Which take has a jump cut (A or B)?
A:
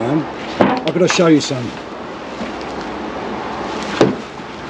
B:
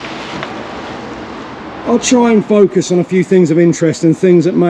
B